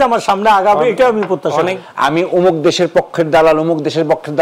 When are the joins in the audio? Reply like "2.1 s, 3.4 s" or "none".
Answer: 1.8 s